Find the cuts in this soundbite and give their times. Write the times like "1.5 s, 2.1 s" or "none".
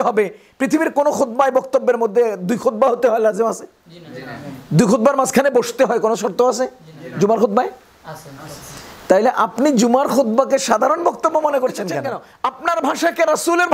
12.2 s